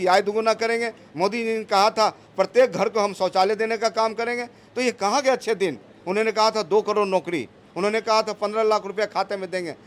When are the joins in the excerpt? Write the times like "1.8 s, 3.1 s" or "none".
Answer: none